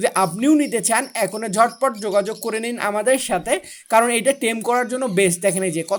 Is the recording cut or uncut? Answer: uncut